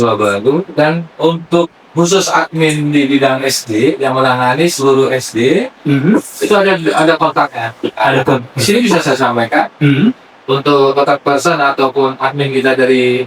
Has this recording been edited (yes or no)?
no